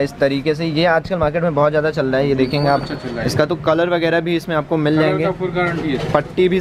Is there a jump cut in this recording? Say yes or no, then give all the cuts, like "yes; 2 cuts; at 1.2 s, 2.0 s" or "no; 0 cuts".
no; 0 cuts